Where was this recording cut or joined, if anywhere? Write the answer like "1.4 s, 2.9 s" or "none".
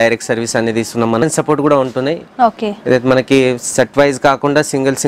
1.2 s